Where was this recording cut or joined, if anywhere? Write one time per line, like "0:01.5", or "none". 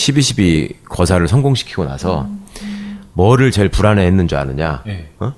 0:03.2

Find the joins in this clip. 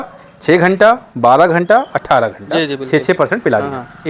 none

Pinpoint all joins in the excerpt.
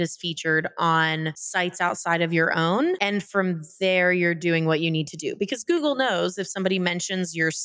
none

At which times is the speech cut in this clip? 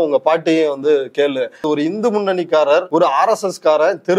0:01.6
0:02.9

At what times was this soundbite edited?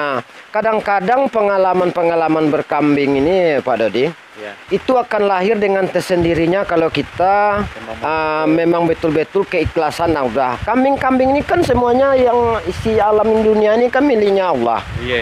none

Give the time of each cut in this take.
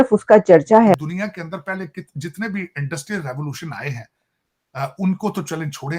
0:00.9

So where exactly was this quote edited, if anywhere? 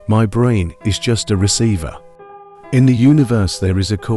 none

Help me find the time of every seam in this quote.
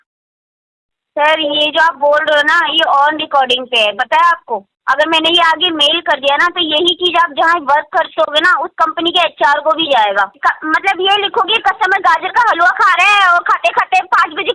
0:10.3

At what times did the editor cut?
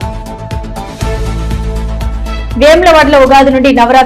0:02.2

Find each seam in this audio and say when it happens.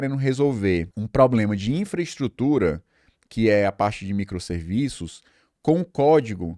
0:01.0

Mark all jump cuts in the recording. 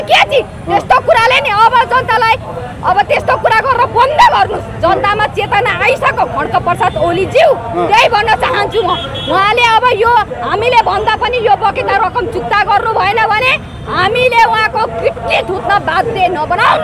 none

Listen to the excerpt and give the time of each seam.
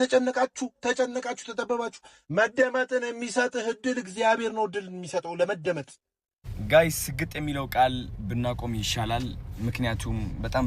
0:06.6

